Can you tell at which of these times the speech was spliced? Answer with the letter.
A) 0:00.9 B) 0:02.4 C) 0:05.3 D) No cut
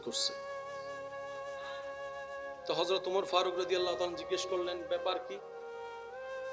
C